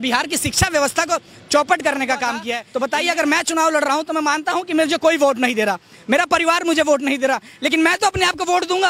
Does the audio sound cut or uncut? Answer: cut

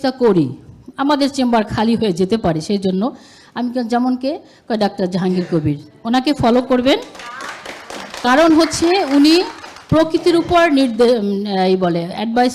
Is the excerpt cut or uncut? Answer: uncut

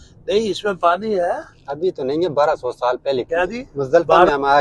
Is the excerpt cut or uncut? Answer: cut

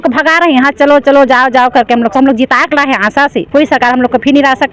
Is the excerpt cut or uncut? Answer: cut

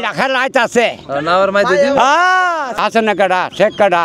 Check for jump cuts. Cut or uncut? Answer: cut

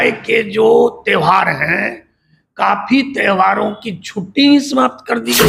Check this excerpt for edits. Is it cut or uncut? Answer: uncut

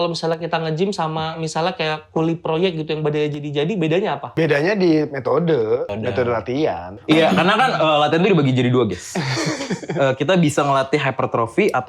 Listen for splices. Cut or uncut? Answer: cut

